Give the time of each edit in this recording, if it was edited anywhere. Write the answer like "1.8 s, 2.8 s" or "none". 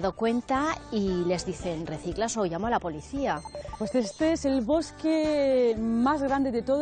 3.7 s